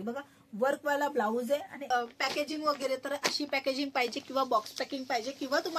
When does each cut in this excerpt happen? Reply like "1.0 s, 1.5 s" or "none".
1.8 s